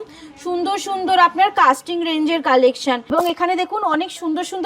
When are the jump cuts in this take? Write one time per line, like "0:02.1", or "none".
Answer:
0:03.1

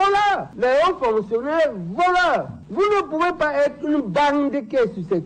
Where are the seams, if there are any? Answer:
none

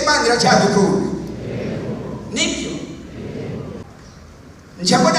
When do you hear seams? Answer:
0:03.8

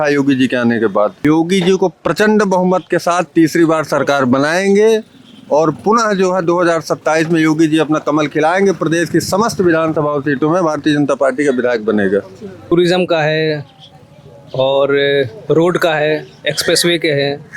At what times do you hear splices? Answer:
0:01.2
0:12.7

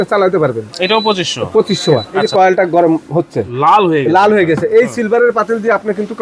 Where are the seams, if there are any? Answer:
0:02.1

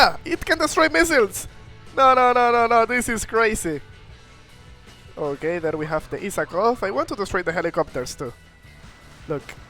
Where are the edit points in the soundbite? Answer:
none

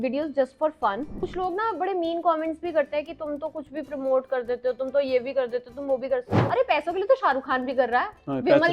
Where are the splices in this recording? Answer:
0:01.1
0:06.4

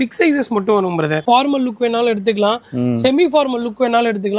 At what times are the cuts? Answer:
0:01.2

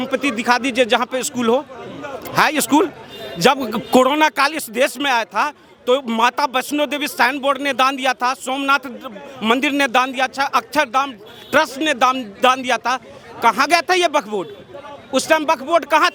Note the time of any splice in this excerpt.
none

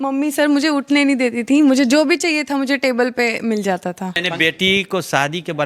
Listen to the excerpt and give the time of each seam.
0:04.2

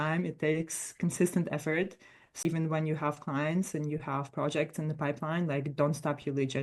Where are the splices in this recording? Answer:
0:02.4

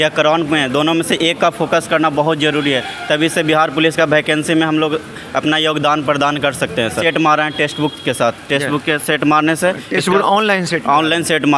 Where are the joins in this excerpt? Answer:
0:07.0

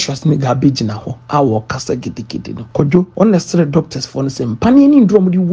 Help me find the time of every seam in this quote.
0:02.9

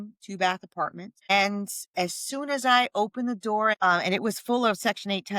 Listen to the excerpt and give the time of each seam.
0:01.1
0:03.8

